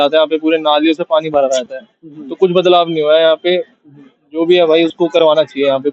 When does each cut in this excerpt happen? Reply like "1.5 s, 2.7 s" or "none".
none